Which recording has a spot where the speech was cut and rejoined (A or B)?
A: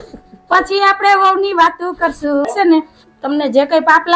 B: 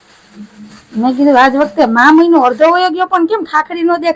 A